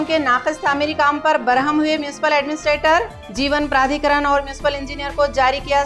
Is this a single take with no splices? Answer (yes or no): yes